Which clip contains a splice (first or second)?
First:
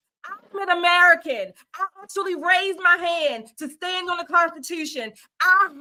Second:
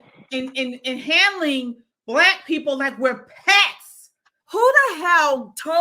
second